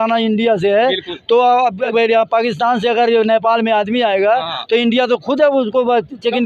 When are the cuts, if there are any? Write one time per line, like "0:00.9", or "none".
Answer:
0:01.9